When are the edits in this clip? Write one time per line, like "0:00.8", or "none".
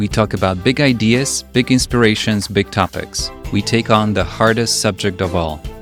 none